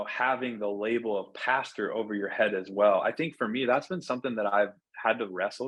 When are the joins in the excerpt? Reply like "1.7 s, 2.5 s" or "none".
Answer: none

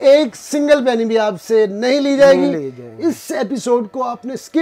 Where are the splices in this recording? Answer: none

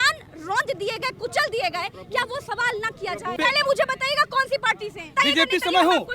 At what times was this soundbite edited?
3.3 s, 5.1 s

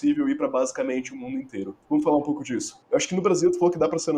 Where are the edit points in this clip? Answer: 1.7 s, 2.7 s

